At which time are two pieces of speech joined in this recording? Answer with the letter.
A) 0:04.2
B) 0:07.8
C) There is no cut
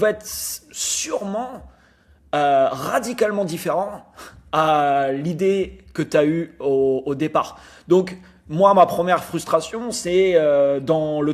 C